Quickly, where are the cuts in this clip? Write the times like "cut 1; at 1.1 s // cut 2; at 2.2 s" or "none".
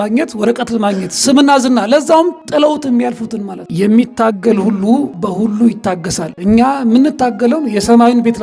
none